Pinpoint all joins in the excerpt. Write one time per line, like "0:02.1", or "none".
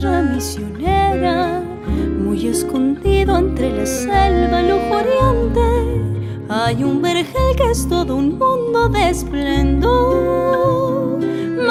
none